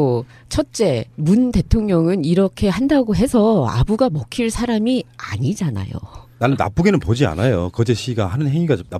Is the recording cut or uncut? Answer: uncut